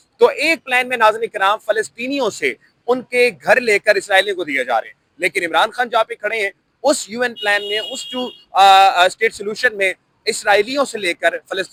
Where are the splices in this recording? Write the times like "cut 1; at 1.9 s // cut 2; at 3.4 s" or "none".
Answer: none